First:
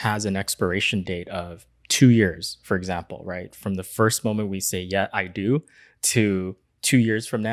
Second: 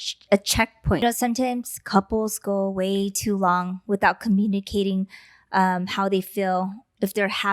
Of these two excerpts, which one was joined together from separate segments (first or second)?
second